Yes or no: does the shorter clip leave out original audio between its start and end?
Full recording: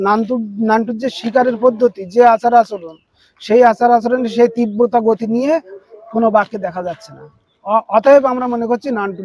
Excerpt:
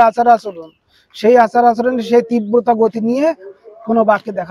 no